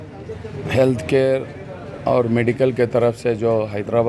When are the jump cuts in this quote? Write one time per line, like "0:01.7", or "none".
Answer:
none